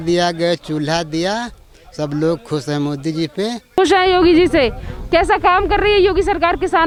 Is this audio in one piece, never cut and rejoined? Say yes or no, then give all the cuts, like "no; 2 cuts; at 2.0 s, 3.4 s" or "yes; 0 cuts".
yes; 0 cuts